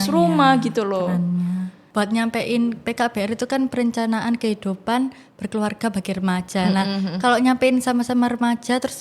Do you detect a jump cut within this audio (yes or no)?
yes